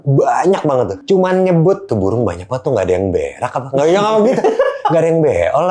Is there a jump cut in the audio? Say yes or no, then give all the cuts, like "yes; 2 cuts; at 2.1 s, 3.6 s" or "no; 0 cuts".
yes; 2 cuts; at 1.0 s, 1.9 s